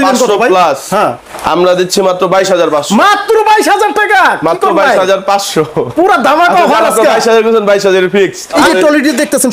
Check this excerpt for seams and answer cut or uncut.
uncut